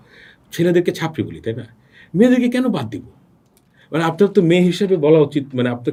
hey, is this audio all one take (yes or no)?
yes